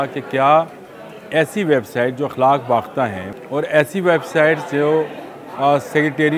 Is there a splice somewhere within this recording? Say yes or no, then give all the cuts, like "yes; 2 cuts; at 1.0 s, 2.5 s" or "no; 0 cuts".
yes; 1 cut; at 3.3 s